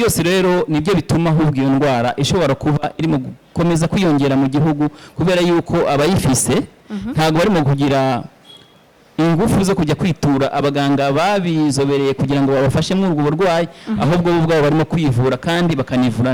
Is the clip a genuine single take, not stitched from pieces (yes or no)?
yes